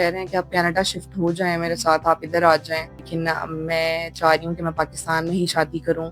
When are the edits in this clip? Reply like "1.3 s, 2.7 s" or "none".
3.1 s